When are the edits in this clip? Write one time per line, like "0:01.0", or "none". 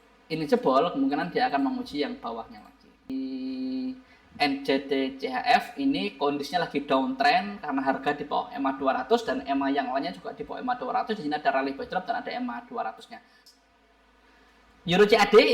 0:03.2
0:13.3